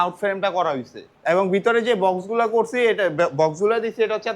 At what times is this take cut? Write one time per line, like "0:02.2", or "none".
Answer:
0:01.1